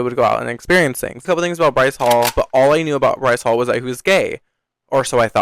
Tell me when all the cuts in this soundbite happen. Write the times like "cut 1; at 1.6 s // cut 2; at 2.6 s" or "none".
cut 1; at 1.2 s

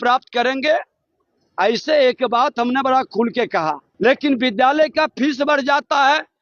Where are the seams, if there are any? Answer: cut 1; at 3.9 s

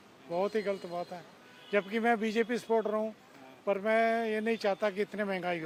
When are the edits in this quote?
none

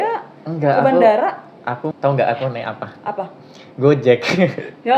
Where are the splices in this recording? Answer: cut 1; at 1.9 s

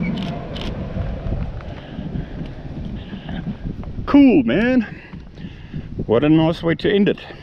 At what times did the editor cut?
cut 1; at 1.6 s

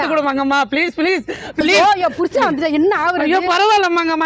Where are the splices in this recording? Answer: cut 1; at 1.6 s

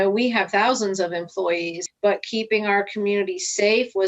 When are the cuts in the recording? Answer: cut 1; at 1.8 s

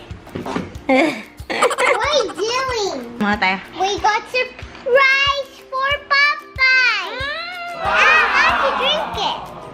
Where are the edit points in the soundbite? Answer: cut 1; at 3.2 s

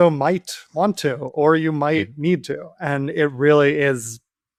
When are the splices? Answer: none

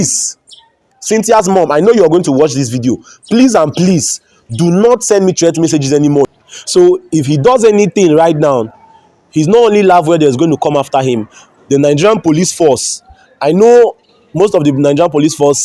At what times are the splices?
cut 1; at 6.2 s

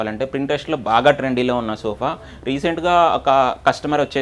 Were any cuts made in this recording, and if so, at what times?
none

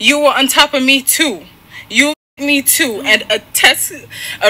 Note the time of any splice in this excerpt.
none

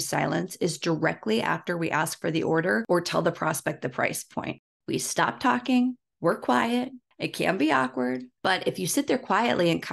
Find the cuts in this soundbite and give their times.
cut 1; at 2.8 s // cut 2; at 4.8 s

